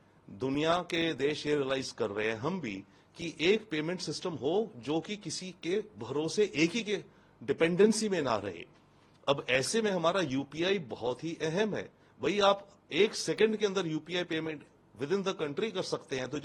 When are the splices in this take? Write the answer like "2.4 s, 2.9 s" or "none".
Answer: none